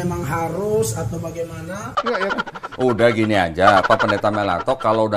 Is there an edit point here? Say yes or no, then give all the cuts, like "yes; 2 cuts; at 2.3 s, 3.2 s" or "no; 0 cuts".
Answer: yes; 1 cut; at 1.9 s